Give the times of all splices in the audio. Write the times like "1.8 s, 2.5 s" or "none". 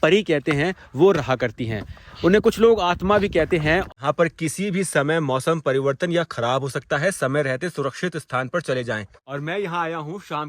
3.8 s, 9.2 s